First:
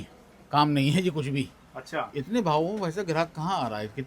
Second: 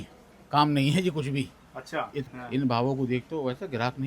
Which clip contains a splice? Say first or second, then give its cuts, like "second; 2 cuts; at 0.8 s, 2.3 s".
second; 1 cut; at 2.2 s